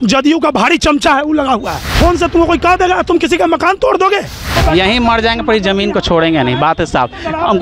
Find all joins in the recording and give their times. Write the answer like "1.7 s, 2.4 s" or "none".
1.8 s, 4.5 s